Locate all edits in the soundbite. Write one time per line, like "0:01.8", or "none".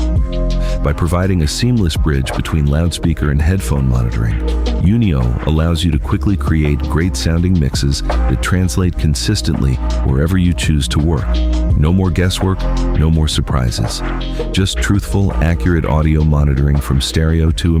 none